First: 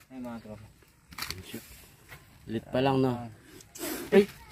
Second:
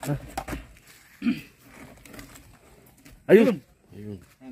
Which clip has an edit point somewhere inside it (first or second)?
first